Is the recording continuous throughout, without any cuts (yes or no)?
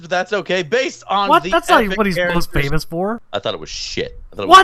no